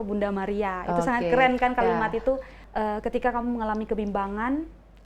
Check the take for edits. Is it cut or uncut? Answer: cut